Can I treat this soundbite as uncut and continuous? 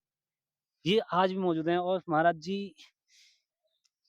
yes; 0 cuts

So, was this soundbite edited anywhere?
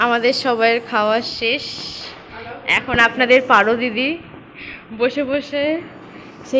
no; 0 cuts

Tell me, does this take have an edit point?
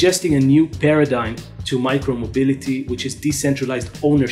no; 0 cuts

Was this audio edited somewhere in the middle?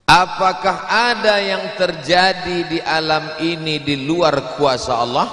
no; 0 cuts

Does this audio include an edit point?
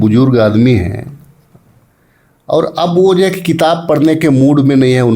no; 0 cuts

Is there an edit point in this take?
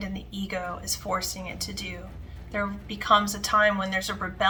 no; 0 cuts

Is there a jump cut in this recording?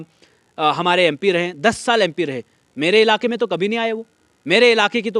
no; 0 cuts

